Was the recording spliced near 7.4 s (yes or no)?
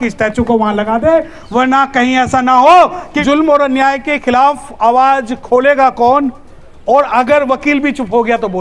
no